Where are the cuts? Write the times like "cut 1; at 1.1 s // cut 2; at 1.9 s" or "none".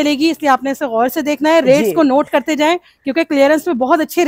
none